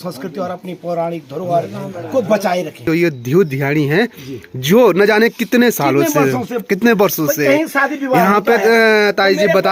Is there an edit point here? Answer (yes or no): yes